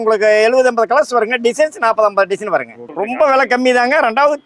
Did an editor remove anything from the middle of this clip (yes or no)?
yes